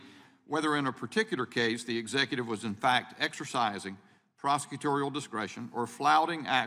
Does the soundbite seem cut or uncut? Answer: uncut